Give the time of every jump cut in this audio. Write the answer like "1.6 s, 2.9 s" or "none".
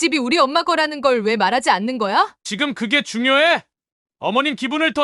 2.4 s